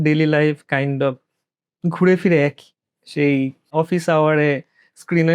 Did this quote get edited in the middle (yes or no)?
yes